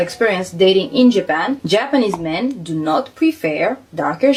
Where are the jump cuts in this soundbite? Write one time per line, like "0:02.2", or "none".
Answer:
none